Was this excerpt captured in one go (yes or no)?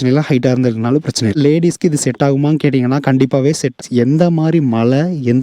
no